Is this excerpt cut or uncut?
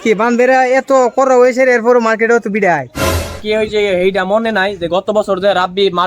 cut